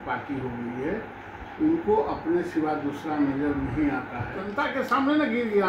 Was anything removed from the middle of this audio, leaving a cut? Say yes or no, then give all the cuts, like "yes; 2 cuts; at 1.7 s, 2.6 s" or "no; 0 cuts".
yes; 1 cut; at 4.5 s